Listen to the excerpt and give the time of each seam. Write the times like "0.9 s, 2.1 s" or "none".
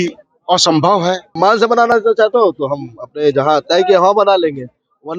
1.3 s